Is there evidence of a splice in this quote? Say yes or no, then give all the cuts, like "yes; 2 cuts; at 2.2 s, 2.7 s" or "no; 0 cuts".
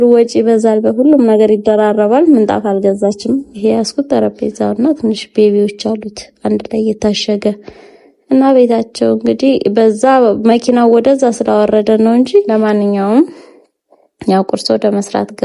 yes; 2 cuts; at 3.5 s, 12.5 s